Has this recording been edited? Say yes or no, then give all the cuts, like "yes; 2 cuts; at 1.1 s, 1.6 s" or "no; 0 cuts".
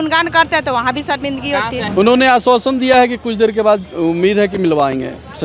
yes; 1 cut; at 1.9 s